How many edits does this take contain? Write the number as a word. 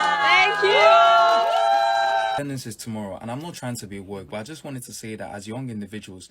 one